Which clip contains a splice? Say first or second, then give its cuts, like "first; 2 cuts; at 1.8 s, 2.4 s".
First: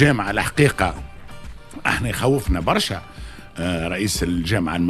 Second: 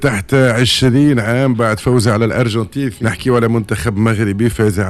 second; 1 cut; at 2.9 s